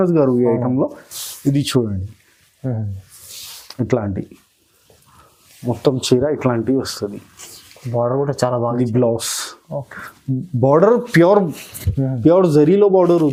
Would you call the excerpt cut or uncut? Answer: uncut